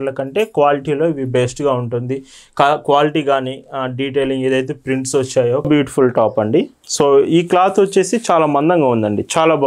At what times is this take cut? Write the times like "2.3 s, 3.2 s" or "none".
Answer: 5.7 s